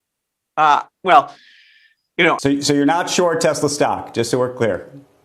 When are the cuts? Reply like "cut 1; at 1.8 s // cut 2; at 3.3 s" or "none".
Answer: cut 1; at 2.4 s